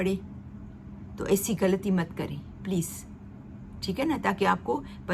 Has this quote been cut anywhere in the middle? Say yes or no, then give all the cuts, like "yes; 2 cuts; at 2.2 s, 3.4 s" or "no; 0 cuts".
no; 0 cuts